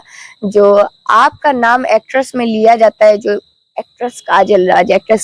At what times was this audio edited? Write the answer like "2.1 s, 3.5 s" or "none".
none